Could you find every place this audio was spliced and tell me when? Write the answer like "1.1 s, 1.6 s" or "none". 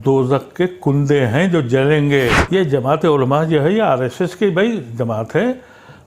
2.4 s